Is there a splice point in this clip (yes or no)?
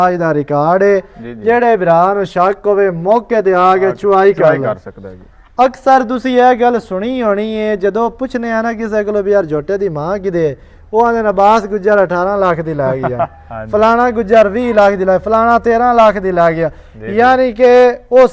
no